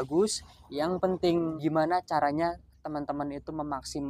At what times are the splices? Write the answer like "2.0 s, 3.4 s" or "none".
1.5 s